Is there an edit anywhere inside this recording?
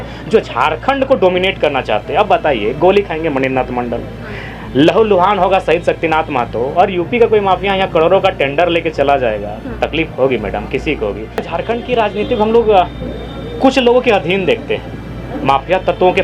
yes; 1 cut; at 11.5 s

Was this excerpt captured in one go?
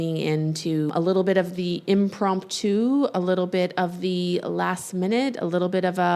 no; 1 cut; at 0.9 s

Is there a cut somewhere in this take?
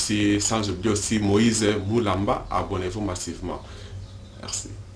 no; 0 cuts

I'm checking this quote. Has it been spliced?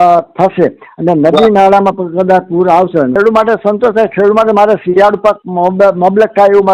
yes; 1 cut; at 3.2 s

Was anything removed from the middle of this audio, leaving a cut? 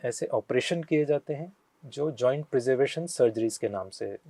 no; 0 cuts

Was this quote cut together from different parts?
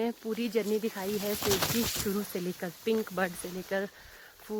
no; 0 cuts

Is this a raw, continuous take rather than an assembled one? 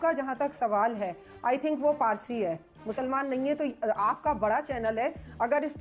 yes; 0 cuts

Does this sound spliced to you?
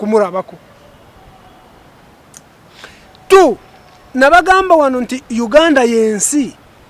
no; 0 cuts

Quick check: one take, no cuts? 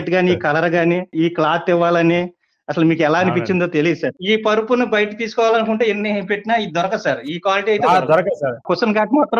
no; 3 cuts; at 1.1 s, 4.2 s, 8.6 s

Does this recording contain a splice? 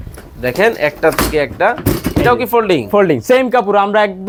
no; 0 cuts

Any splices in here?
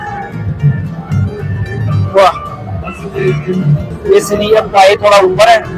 yes; 1 cut; at 3.9 s

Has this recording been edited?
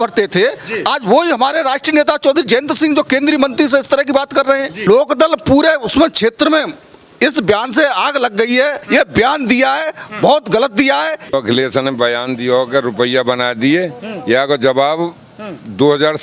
yes; 3 cuts; at 4.9 s, 8.8 s, 11.3 s

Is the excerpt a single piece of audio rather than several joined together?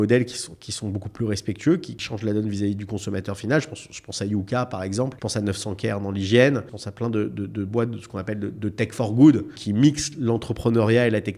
no; 4 cuts; at 2.0 s, 5.2 s, 6.8 s, 9.6 s

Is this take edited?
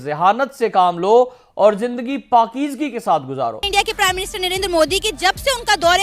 yes; 1 cut; at 3.6 s

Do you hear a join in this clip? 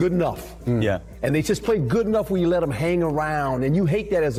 no; 0 cuts

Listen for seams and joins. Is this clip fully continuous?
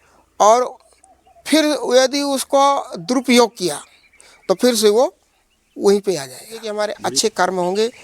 no; 1 cut; at 6.7 s

